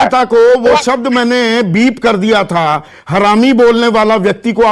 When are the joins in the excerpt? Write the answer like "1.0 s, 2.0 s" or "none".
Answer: none